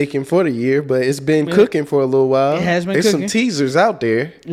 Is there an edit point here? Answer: no; 0 cuts

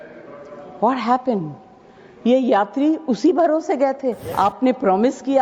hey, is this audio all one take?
no; 1 cut; at 4.2 s

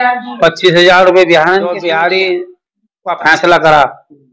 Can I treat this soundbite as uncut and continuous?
no; 1 cut; at 1.8 s

